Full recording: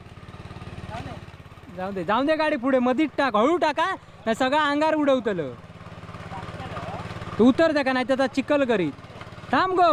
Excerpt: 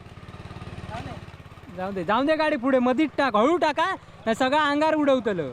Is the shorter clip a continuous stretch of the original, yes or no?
yes